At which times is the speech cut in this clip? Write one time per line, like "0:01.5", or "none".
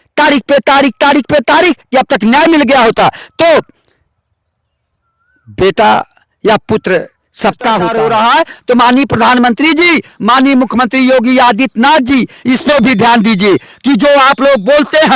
0:07.9